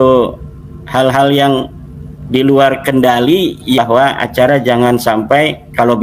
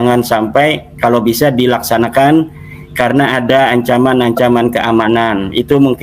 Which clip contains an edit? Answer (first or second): first